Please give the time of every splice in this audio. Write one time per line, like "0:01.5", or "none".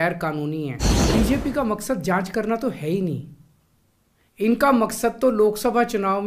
0:00.9

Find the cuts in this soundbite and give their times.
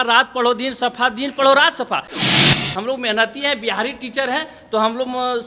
0:02.4

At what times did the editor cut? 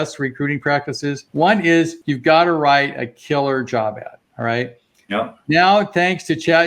0:01.2
0:02.0

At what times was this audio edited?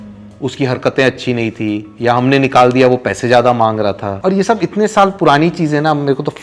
0:04.1

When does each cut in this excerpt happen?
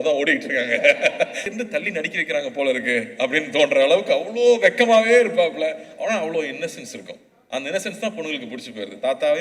0:01.5

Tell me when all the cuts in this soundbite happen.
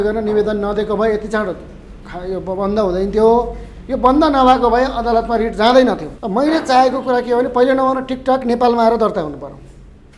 0:06.1

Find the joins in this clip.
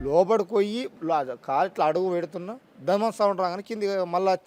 0:00.9

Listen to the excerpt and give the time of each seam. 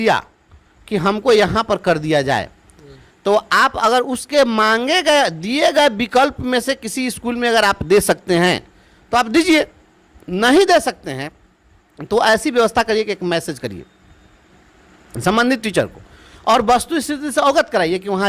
none

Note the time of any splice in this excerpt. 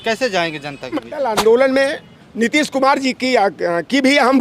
0:01.2

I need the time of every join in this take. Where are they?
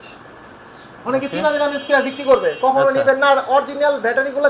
none

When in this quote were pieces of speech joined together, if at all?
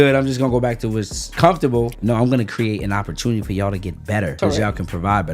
0:01.3
0:02.0
0:04.3

